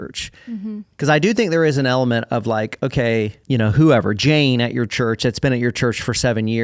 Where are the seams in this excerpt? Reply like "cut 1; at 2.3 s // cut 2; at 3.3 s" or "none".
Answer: cut 1; at 3.4 s